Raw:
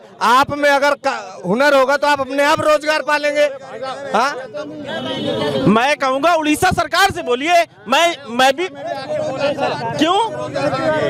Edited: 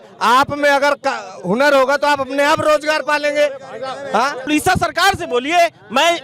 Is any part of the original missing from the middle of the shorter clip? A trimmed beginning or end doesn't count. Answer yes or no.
yes